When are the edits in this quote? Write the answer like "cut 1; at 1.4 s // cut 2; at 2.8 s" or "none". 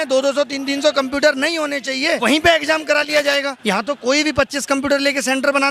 cut 1; at 2.2 s // cut 2; at 3.5 s

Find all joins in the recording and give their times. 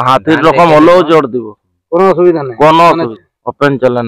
cut 1; at 3.1 s

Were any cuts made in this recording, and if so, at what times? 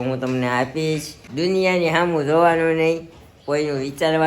cut 1; at 1.2 s

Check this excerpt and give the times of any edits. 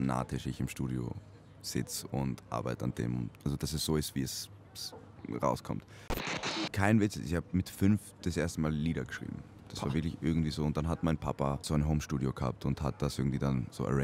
cut 1; at 3.3 s // cut 2; at 6.3 s // cut 3; at 11.7 s

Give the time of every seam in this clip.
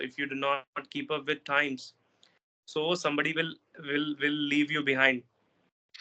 none

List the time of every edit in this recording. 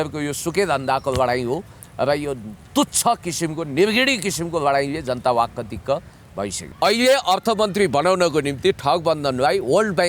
cut 1; at 6.6 s

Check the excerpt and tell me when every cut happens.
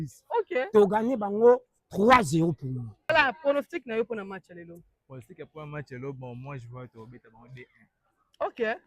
cut 1; at 3.1 s

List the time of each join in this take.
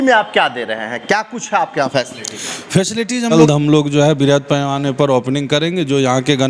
cut 1; at 3.3 s

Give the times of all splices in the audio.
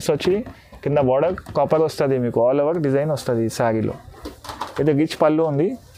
none

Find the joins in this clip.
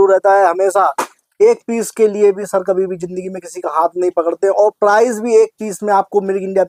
none

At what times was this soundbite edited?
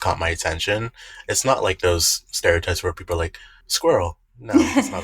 cut 1; at 3.6 s

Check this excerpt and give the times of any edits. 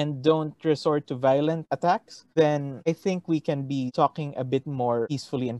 none

